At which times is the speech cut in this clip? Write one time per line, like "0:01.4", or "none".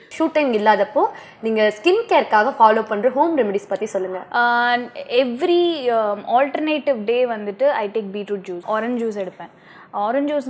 none